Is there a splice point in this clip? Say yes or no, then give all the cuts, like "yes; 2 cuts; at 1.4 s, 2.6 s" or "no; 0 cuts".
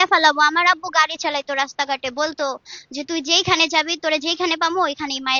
no; 0 cuts